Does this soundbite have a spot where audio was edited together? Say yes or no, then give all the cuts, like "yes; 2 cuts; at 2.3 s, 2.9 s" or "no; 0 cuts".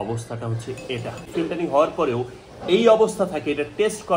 yes; 1 cut; at 1.3 s